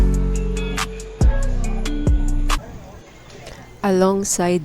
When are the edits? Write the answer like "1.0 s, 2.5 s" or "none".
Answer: 2.6 s